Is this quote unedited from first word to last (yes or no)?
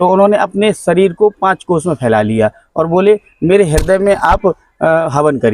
yes